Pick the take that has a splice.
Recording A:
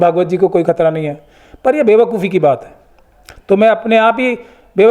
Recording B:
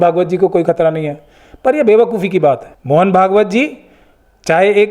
B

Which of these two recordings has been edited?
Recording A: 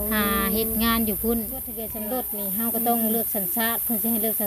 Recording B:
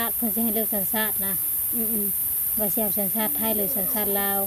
A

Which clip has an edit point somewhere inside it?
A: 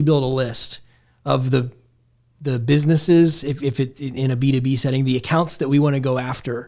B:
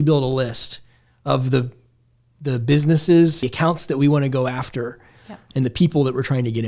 B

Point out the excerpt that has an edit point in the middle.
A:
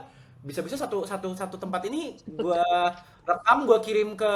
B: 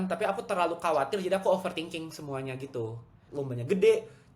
B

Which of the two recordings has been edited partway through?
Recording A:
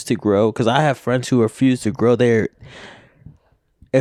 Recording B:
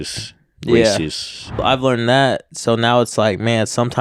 B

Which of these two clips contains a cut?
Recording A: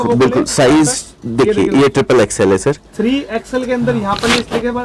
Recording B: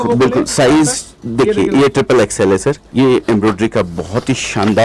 B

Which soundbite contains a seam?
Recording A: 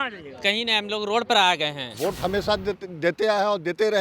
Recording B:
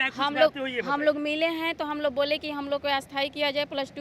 A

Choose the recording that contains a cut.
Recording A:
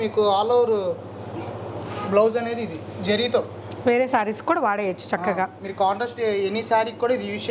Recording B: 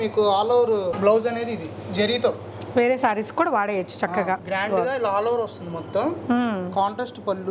B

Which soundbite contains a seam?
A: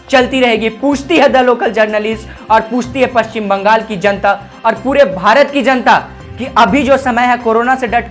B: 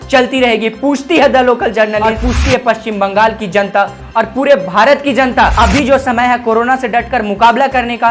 B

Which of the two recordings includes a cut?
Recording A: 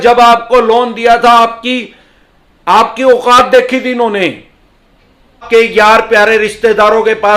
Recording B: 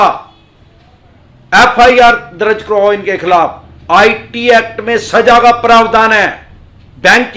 A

